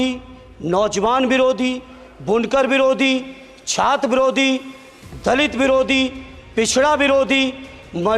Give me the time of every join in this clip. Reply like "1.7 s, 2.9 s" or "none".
none